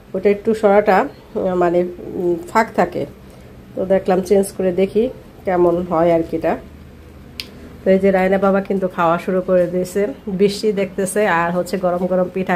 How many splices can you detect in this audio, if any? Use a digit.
0